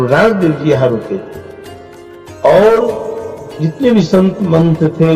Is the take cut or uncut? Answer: uncut